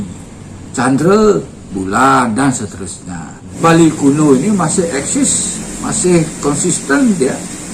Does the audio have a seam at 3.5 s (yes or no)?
yes